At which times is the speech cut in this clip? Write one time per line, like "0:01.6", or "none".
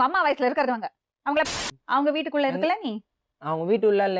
0:01.4